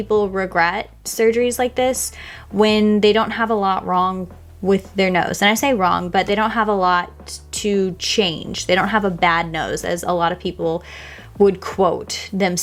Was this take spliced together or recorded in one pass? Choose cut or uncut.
uncut